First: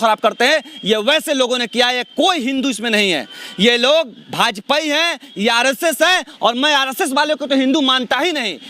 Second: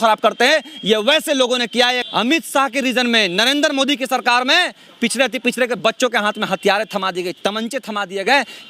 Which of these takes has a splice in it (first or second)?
second